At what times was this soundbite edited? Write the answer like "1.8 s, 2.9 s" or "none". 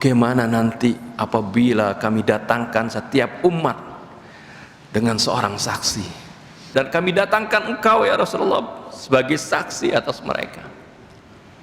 6.7 s